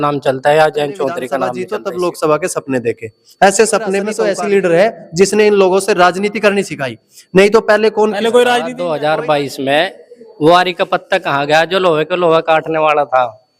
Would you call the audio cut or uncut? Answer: cut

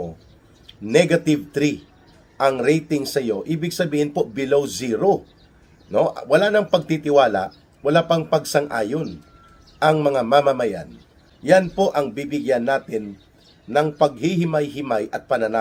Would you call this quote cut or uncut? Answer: uncut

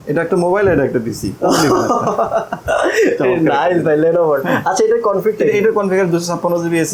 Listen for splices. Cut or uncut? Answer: uncut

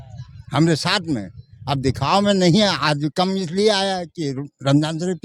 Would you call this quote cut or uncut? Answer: uncut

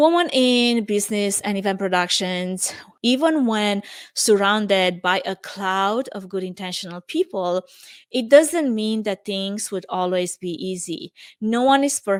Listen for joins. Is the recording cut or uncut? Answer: uncut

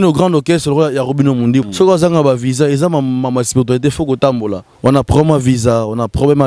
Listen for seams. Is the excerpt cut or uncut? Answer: cut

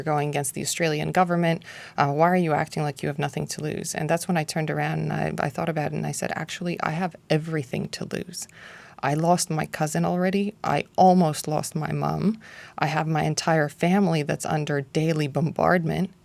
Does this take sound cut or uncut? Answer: uncut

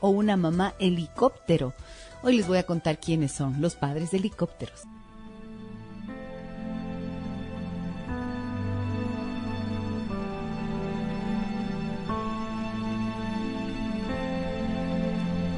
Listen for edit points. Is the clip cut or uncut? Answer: uncut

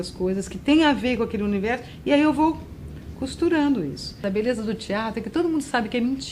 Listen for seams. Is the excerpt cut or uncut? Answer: cut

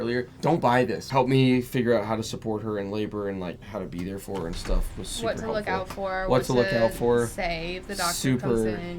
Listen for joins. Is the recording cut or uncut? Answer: cut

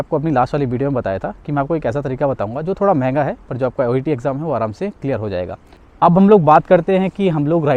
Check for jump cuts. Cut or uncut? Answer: cut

